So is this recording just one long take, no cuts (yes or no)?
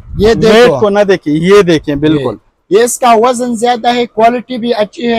yes